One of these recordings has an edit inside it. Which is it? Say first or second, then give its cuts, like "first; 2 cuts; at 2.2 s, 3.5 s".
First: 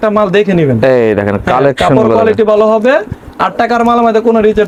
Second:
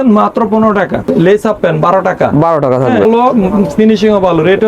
second; 2 cuts; at 1.0 s, 3.0 s